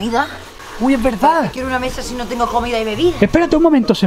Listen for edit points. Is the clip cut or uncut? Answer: uncut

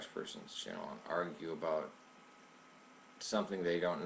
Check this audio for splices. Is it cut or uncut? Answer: cut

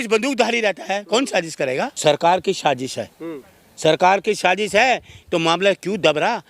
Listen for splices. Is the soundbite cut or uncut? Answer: cut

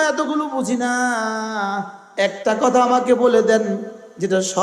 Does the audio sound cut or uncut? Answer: cut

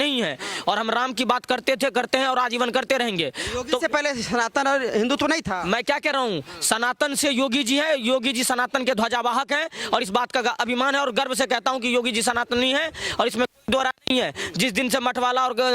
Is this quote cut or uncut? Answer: uncut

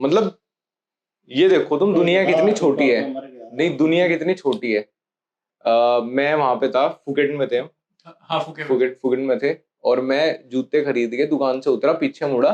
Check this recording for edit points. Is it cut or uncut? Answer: uncut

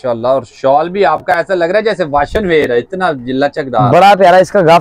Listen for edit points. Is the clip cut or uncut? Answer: uncut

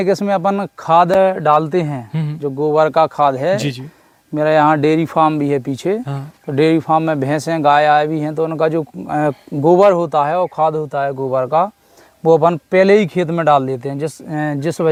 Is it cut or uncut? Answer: uncut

